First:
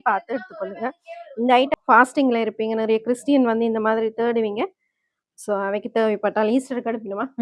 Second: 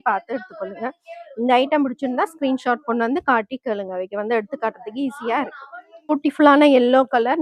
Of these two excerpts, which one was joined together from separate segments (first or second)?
first